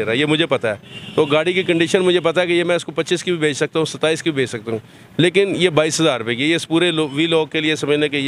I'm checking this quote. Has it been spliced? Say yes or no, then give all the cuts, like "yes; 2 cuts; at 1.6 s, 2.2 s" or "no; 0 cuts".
no; 0 cuts